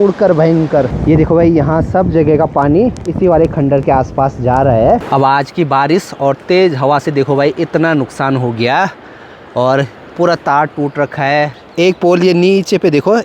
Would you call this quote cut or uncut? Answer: cut